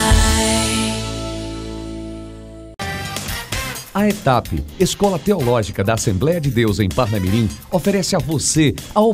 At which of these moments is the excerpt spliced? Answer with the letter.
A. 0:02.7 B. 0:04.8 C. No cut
A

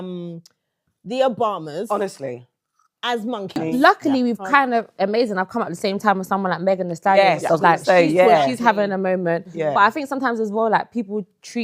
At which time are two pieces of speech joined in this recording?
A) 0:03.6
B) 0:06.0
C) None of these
A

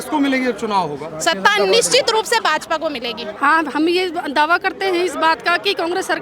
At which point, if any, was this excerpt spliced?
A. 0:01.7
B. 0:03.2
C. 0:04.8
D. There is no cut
B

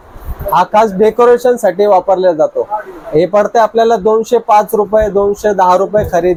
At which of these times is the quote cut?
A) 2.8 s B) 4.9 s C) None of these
C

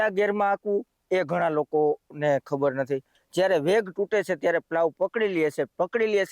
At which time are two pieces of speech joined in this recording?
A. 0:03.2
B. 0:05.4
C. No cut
A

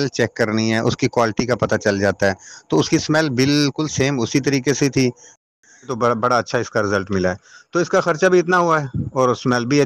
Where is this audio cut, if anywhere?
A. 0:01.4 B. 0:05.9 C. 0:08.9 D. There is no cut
B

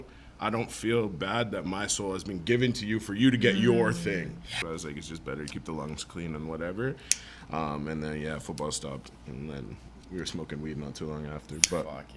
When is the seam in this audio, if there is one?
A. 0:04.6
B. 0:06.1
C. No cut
A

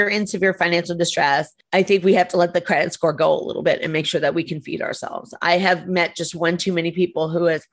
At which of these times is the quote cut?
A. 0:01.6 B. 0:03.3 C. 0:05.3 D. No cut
A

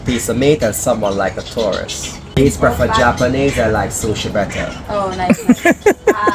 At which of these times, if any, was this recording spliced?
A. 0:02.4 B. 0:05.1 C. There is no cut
A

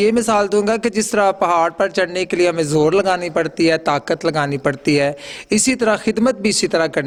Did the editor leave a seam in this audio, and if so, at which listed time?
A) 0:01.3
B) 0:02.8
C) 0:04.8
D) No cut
D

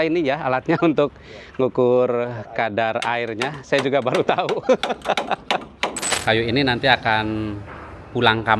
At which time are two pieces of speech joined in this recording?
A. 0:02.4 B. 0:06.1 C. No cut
B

